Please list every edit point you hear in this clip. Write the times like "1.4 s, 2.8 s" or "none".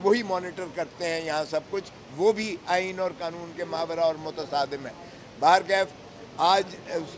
none